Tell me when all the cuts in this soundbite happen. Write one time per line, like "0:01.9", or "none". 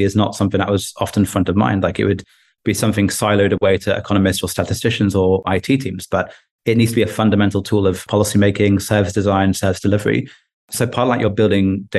0:05.4
0:08.0